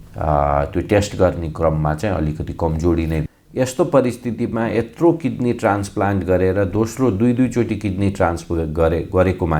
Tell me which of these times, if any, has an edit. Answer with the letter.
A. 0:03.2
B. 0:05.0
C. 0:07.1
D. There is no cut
A